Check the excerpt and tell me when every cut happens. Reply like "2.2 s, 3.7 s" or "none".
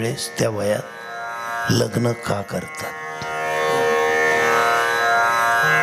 none